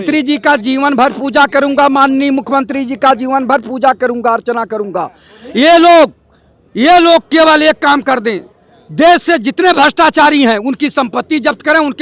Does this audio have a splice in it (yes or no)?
no